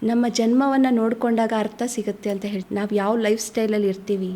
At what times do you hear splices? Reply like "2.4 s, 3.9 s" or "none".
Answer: 2.6 s